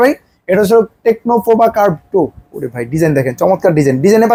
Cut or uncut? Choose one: uncut